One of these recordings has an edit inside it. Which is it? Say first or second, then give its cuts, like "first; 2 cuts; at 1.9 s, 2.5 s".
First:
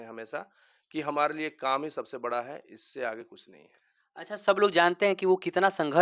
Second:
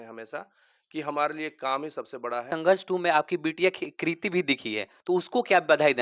second; 1 cut; at 2.5 s